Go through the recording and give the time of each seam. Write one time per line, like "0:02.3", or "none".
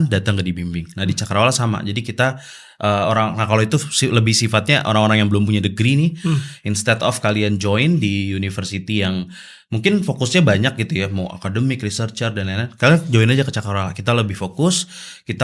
none

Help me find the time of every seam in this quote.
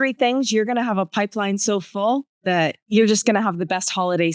0:02.8

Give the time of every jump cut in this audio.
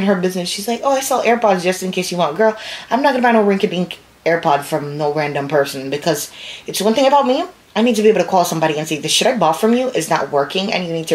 none

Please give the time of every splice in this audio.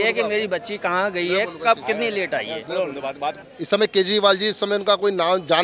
0:03.5

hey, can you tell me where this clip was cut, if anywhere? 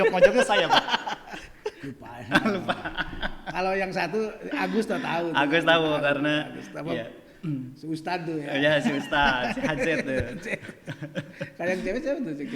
0:01.8

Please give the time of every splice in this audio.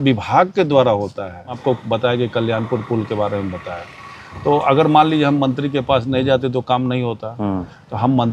0:01.6

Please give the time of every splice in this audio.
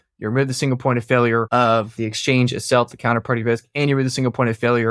0:01.6

